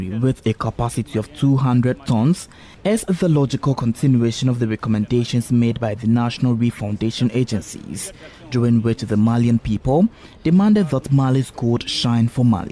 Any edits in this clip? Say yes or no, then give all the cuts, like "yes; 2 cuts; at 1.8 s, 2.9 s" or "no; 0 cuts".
no; 0 cuts